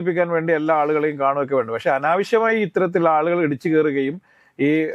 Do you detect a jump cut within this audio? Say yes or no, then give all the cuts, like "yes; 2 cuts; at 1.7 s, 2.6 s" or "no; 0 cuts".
no; 0 cuts